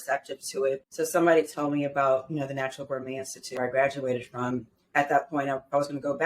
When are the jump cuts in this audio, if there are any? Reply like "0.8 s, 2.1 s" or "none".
0.9 s, 4.9 s